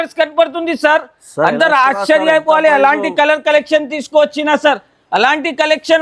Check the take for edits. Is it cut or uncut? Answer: uncut